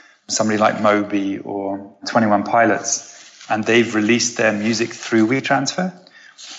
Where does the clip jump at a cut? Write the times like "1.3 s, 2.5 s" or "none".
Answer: 2.0 s